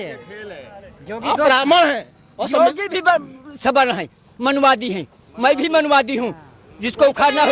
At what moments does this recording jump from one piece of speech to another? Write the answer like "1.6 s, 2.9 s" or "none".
none